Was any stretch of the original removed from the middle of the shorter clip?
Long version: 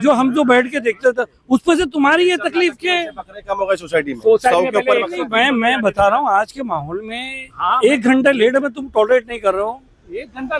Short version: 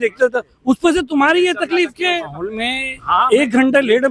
yes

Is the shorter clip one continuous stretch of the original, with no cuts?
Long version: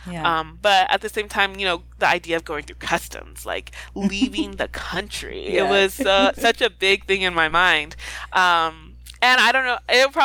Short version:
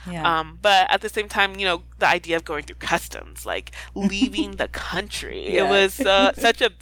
yes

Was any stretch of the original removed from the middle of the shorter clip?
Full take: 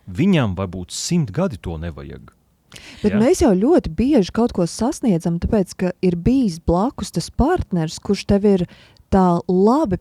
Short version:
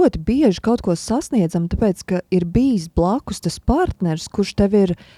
no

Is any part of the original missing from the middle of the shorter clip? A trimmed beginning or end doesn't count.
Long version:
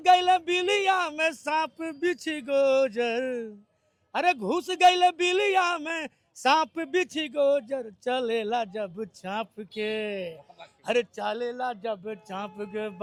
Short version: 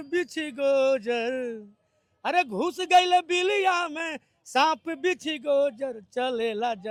no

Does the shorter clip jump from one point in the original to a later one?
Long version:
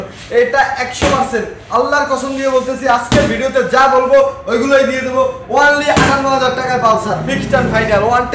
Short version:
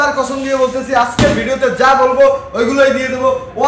no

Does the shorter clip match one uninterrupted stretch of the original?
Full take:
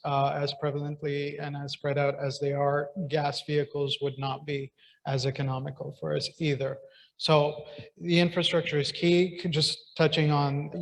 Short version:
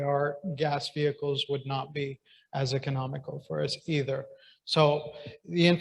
yes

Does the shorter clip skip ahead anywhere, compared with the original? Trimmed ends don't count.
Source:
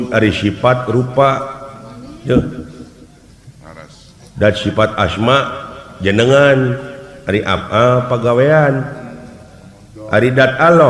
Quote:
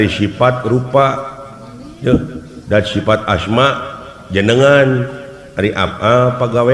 yes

